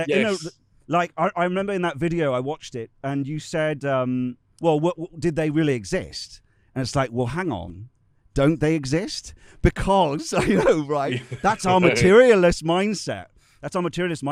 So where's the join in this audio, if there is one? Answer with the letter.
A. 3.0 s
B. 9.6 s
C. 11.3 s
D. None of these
D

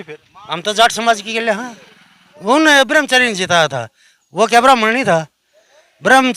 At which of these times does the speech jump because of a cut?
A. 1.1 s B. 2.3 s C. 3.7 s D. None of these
B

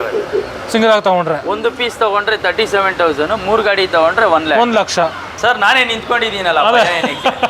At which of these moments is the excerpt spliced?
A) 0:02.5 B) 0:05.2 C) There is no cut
B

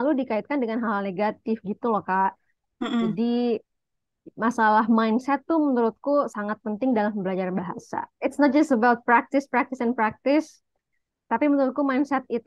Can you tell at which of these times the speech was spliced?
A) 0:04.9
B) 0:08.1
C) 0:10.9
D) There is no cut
B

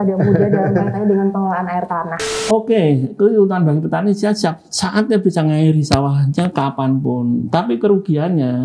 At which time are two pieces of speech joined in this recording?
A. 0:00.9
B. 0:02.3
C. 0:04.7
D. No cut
B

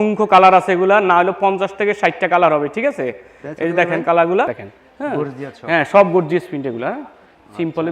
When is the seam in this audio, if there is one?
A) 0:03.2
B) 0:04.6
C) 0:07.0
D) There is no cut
B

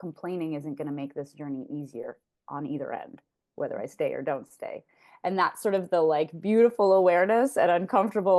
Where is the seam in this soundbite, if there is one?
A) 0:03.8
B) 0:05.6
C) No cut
C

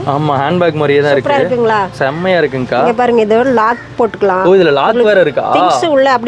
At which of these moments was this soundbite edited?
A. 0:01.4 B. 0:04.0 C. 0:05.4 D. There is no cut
D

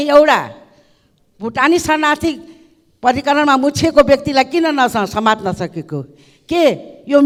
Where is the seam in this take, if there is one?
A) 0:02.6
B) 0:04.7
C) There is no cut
C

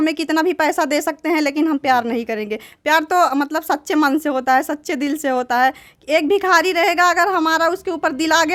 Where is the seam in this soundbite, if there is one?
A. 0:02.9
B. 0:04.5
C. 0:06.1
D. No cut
D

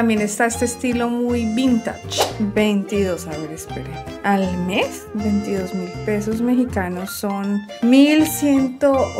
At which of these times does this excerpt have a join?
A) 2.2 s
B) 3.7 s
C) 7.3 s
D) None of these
A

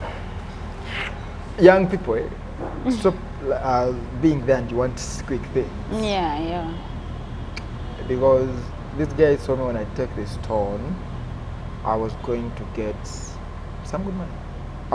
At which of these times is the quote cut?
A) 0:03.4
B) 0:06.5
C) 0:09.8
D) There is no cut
D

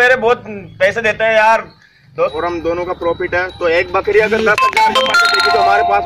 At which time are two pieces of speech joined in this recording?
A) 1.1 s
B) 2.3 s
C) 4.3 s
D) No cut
B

